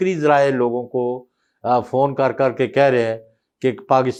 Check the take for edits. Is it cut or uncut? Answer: uncut